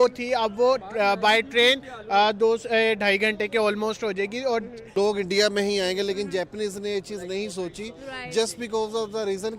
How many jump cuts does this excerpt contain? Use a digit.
1